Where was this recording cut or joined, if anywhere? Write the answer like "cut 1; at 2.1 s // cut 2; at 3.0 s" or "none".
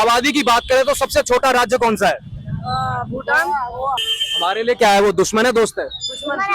cut 1; at 4.1 s